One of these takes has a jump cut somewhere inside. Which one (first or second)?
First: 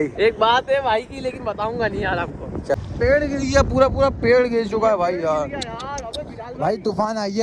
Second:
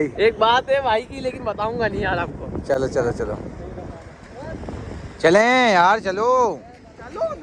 first